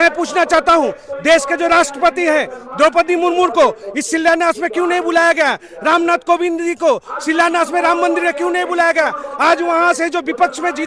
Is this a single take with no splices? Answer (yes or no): yes